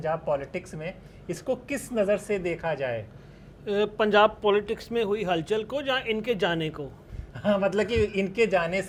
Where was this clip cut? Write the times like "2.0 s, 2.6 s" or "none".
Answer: none